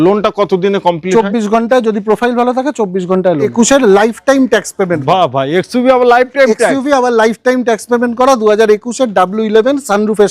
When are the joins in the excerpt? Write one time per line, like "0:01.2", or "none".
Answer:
0:03.5